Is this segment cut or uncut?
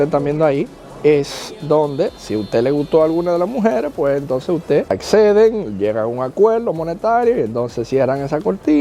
uncut